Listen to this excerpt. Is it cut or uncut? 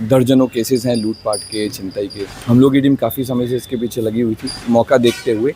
cut